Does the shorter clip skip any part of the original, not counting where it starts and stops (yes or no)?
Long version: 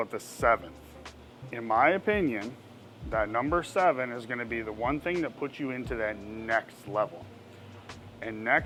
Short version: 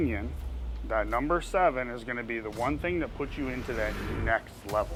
no